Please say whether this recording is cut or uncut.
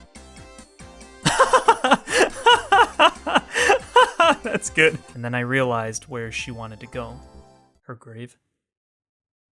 cut